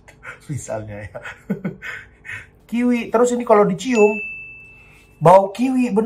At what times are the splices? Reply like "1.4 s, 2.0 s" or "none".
2.5 s